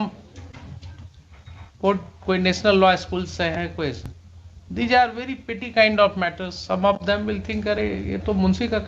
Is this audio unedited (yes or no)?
yes